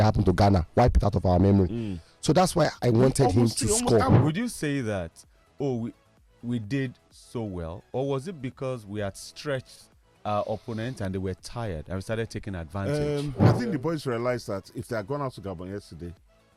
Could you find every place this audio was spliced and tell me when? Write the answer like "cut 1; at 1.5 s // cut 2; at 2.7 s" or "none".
cut 1; at 4.1 s // cut 2; at 13.4 s